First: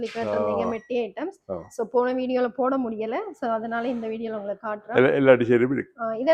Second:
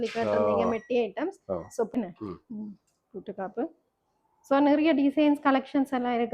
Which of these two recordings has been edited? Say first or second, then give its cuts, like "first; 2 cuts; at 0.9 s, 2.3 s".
second; 1 cut; at 1.9 s